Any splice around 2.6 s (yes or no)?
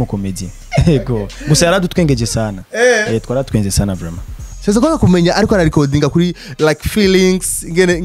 no